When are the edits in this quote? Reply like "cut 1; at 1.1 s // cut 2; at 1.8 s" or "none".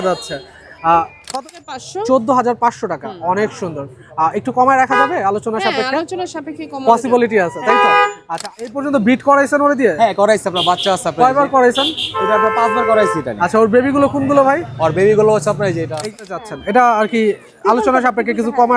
cut 1; at 1.3 s // cut 2; at 8.4 s // cut 3; at 16.1 s